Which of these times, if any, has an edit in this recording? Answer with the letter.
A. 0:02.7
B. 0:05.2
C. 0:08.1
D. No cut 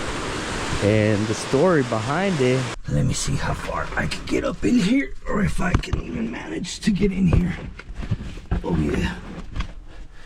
A